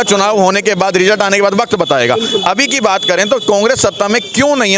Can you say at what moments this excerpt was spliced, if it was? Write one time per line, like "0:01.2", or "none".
none